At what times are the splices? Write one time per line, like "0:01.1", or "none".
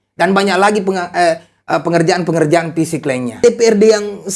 0:03.4